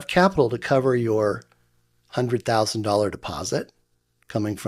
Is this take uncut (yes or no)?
yes